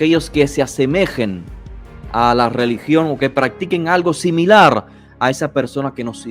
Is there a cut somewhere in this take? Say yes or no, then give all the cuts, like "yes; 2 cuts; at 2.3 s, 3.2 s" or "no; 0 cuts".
no; 0 cuts